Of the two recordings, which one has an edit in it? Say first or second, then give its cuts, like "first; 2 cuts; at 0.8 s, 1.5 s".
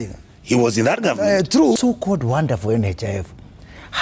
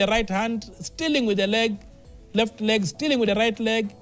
first; 1 cut; at 1.8 s